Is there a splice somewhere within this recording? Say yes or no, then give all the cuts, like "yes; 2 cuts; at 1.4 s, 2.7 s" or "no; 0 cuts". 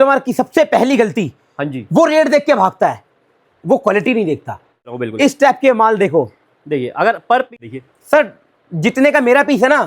yes; 2 cuts; at 5.0 s, 7.5 s